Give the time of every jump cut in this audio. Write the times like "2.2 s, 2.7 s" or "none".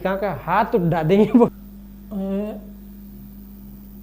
1.5 s

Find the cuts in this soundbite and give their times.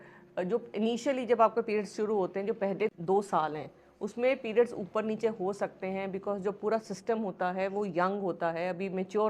2.9 s

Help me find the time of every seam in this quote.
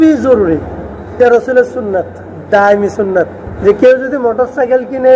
1.2 s, 3.4 s

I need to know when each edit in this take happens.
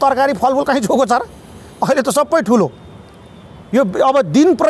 none

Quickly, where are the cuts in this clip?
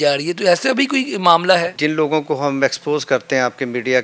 1.7 s

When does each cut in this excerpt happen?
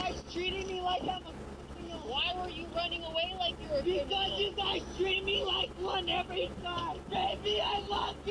none

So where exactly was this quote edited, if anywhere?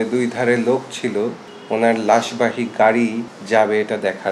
1.5 s, 3.3 s

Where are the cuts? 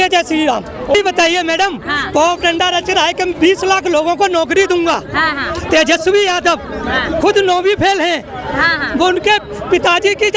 1.0 s

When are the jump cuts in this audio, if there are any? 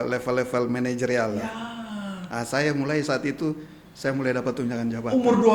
none

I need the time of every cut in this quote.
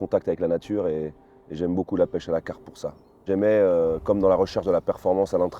3.2 s

